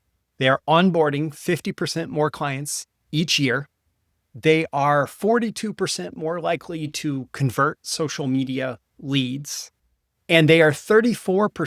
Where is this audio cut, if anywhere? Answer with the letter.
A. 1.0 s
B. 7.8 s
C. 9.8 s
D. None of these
C